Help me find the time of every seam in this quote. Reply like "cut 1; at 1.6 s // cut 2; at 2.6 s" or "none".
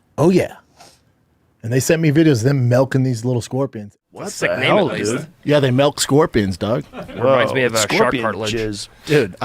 cut 1; at 3.9 s